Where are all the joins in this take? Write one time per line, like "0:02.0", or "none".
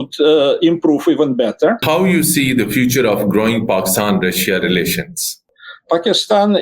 0:01.8
0:05.4